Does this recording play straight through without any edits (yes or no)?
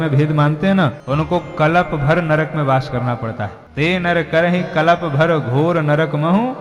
no